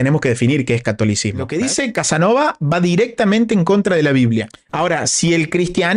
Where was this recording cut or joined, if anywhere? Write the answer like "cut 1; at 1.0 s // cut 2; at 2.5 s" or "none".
cut 1; at 1.5 s // cut 2; at 4.6 s

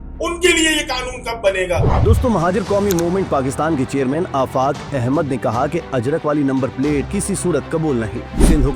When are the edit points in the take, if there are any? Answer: cut 1; at 1.9 s

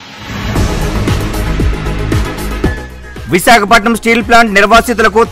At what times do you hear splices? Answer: cut 1; at 1.5 s // cut 2; at 2.5 s

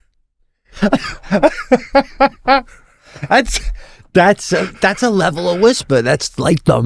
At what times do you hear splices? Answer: none

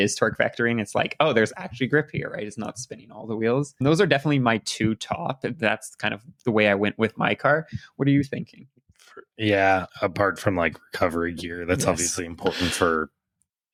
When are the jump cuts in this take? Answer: none

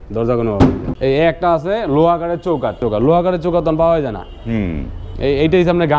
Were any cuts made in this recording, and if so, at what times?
cut 1; at 0.9 s // cut 2; at 2.8 s

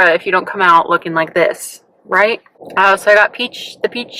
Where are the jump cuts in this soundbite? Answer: none

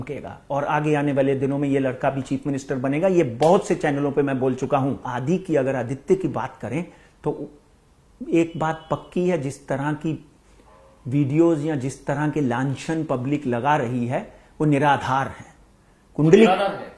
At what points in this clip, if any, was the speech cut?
cut 1; at 5.1 s

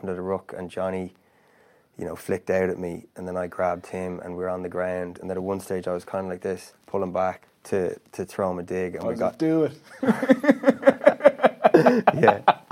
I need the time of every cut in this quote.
cut 1; at 5.2 s // cut 2; at 6.7 s // cut 3; at 7.5 s

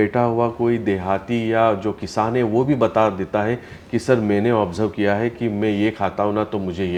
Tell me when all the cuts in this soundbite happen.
none

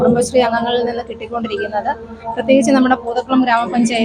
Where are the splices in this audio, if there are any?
none

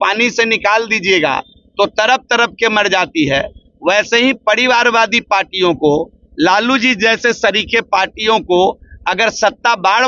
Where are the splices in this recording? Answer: none

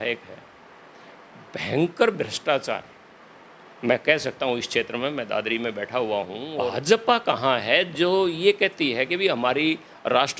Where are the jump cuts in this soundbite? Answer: cut 1; at 6.4 s

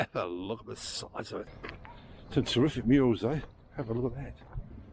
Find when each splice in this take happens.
cut 1; at 1.5 s

